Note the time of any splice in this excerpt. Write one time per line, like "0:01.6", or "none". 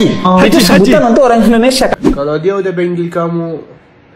0:01.9